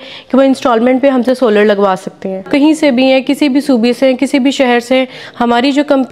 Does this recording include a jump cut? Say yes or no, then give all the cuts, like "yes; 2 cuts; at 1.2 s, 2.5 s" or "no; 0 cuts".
yes; 1 cut; at 2.4 s